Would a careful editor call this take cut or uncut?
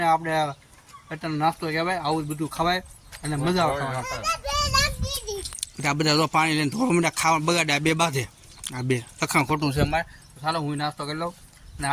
uncut